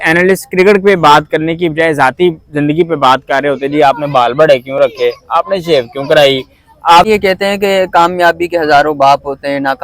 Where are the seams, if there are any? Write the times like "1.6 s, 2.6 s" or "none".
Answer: 7.1 s